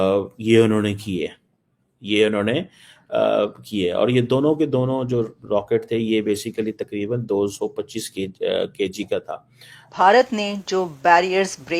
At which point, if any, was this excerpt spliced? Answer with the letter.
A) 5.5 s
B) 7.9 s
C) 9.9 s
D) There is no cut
C